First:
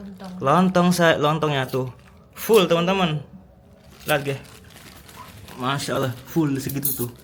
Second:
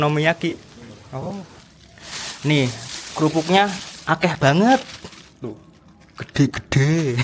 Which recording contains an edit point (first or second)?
second